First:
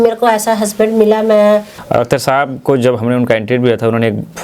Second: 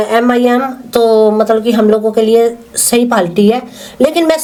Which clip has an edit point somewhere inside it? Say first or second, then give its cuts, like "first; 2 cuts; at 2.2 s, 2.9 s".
first; 1 cut; at 1.8 s